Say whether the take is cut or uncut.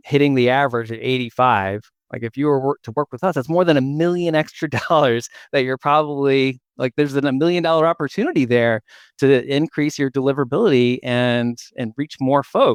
uncut